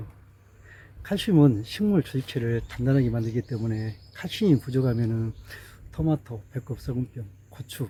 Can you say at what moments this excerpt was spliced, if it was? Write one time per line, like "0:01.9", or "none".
none